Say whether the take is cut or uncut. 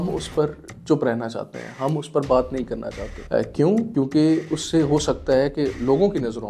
uncut